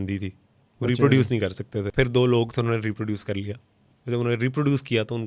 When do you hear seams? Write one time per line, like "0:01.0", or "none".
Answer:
0:01.8